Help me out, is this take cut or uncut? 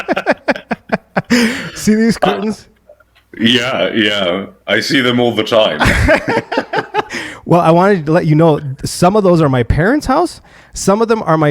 uncut